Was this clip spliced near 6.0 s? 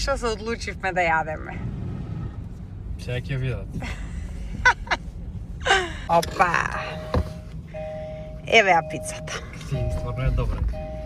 yes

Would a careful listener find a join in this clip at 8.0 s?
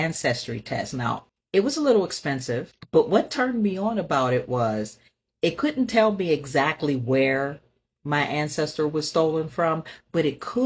no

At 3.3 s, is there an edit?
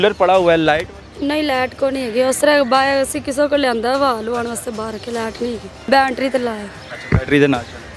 no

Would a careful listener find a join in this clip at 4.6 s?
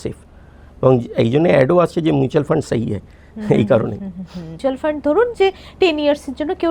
yes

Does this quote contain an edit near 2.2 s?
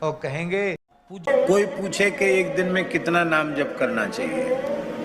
no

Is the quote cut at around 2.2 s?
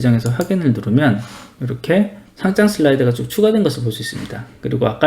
yes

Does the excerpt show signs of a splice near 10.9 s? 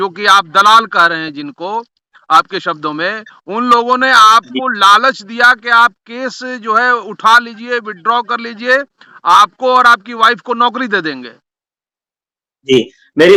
no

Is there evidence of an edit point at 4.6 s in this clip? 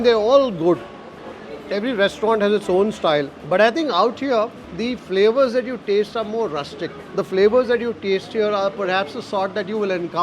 yes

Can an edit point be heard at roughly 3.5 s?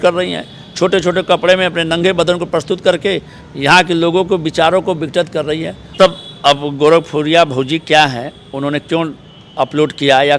no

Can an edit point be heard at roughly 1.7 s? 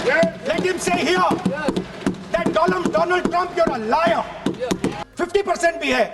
no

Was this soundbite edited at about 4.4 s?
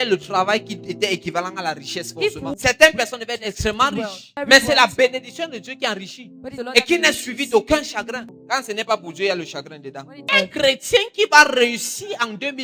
yes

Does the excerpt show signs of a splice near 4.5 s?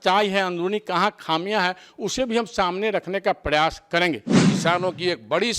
yes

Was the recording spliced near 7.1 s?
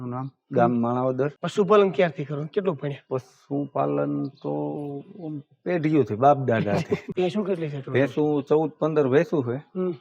yes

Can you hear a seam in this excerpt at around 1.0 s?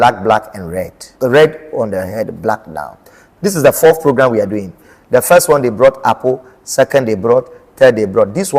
yes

